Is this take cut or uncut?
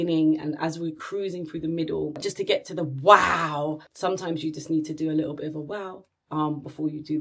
cut